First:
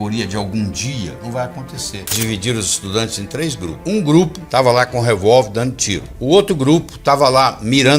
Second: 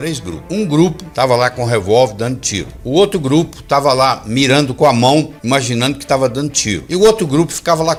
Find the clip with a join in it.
first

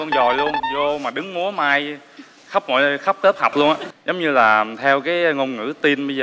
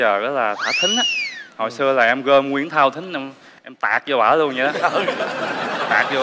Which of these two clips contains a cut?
first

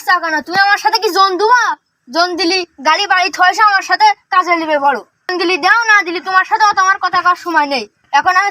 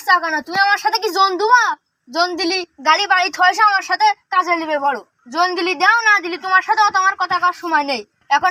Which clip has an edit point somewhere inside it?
first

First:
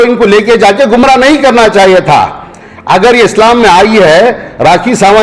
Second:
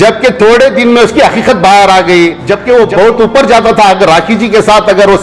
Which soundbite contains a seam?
second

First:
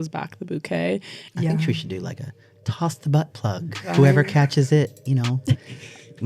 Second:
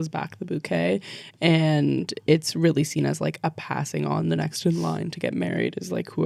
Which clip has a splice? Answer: first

